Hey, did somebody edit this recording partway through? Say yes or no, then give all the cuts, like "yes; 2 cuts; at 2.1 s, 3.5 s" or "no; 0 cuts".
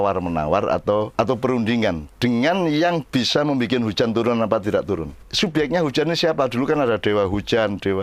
yes; 2 cuts; at 1.1 s, 5.2 s